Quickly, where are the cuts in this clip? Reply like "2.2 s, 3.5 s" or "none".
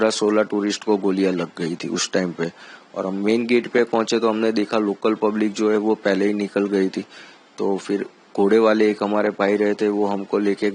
none